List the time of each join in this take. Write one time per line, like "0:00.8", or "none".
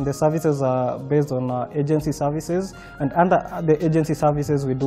none